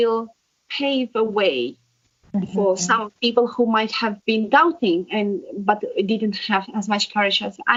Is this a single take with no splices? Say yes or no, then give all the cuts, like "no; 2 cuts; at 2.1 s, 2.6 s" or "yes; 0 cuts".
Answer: yes; 0 cuts